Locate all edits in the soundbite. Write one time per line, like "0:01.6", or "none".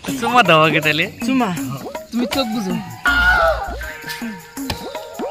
none